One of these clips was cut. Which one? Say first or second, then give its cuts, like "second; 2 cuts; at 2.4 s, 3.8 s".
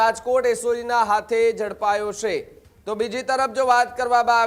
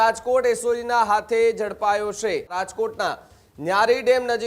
second; 1 cut; at 2.5 s